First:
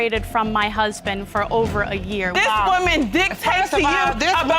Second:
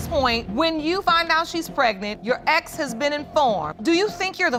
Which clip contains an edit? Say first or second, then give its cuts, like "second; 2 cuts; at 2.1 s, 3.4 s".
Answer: first; 1 cut; at 2.3 s